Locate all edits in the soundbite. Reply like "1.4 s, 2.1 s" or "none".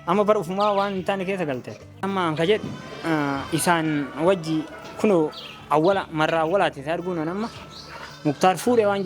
2.0 s